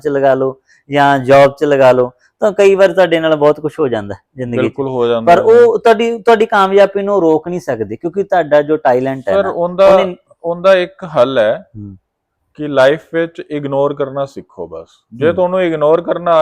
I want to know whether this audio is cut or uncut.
uncut